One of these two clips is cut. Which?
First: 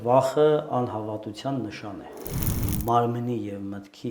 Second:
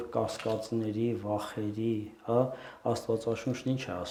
first; 1 cut; at 2.5 s

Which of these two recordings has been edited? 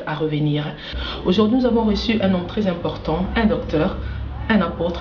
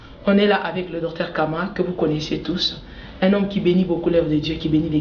first; 1 cut; at 1.0 s

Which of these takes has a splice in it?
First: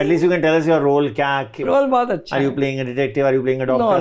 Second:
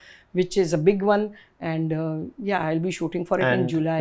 first; 1 cut; at 1.6 s

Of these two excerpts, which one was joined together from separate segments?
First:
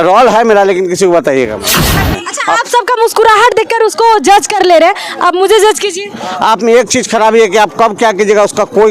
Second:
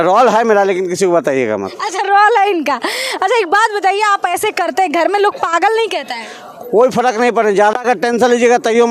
first; 1 cut; at 2.0 s

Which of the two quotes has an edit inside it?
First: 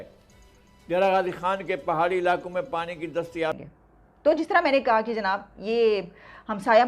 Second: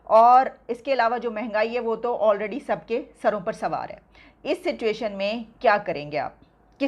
first; 1 cut; at 3.6 s

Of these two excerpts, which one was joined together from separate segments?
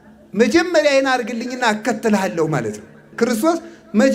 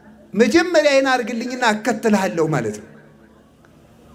first; 1 cut; at 3.0 s

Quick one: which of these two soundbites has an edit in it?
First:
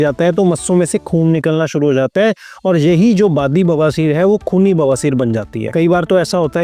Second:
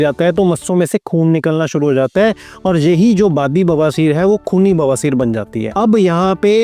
first; 1 cut; at 5.6 s

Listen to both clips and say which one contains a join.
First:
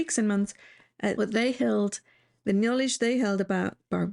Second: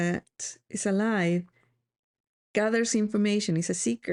first; 1 cut; at 1.1 s

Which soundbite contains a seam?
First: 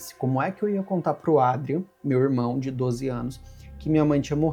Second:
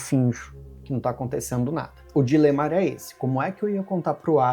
second; 1 cut; at 2.0 s

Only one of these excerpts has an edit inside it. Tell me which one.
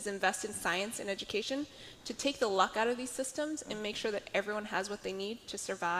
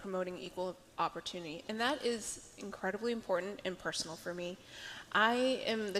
second; 1 cut; at 1.2 s

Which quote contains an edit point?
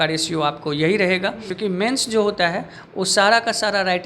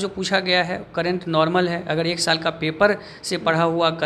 first; 1 cut; at 1.5 s

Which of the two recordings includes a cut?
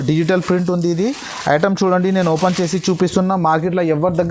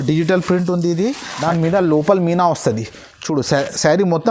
second; 1 cut; at 1.3 s

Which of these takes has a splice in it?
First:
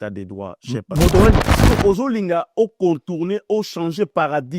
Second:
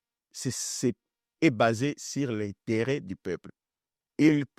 first; 1 cut; at 1.4 s

